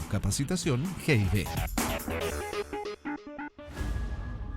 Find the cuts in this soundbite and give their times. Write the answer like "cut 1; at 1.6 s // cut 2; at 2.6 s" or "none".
cut 1; at 3.6 s